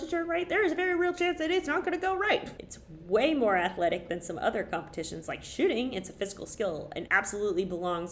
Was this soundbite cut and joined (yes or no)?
no